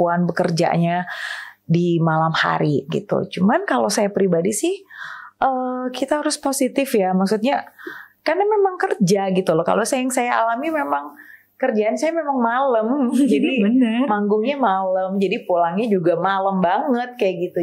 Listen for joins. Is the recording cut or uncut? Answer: uncut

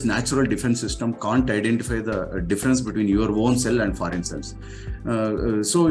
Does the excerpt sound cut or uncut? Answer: uncut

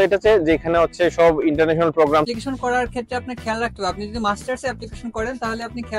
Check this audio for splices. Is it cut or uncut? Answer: cut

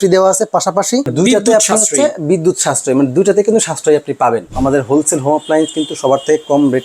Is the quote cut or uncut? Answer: cut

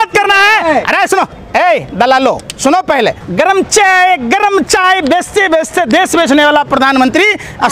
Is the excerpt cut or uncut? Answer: cut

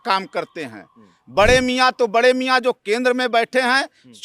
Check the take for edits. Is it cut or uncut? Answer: uncut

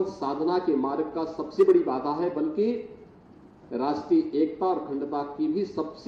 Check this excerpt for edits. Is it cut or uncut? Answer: uncut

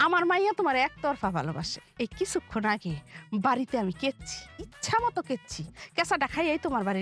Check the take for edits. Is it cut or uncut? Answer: cut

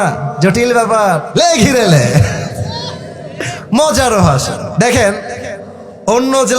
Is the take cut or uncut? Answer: cut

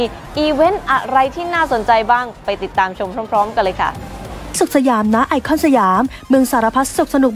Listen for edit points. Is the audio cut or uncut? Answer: cut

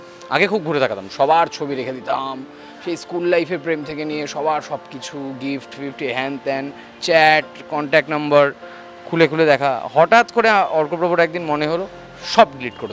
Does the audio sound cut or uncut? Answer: uncut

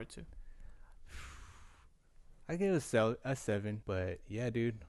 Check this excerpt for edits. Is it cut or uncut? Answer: cut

